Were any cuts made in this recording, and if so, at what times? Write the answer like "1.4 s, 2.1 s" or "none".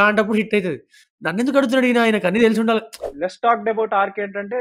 3.0 s